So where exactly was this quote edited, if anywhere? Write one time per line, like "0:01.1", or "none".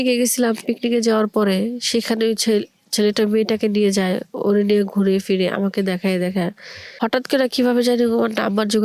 0:06.8

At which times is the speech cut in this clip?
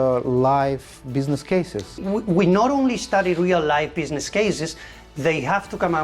0:01.9

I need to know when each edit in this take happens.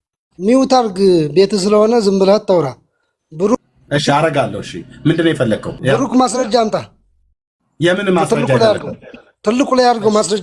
0:05.7

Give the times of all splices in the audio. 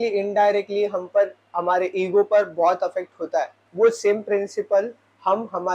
0:03.6

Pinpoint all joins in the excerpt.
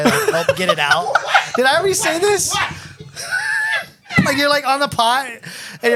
none

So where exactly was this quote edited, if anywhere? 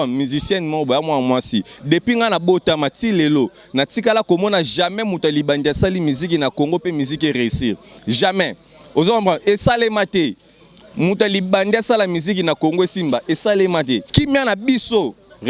0:14.1

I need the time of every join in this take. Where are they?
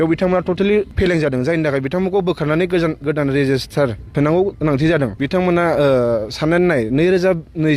0:00.9
0:04.0
0:05.2

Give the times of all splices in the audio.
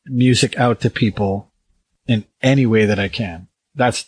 0:01.9

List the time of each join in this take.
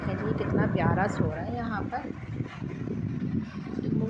none

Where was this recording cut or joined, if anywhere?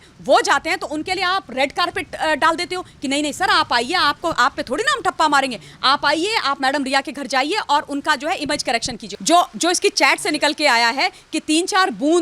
0:09.0

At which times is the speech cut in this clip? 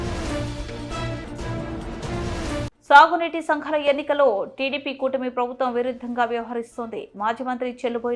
0:02.7

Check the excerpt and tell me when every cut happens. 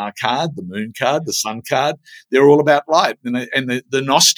none

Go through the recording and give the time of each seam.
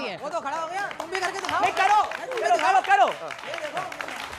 none

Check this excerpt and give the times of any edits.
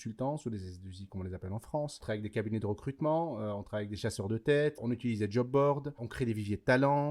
0:02.0
0:04.8
0:06.0

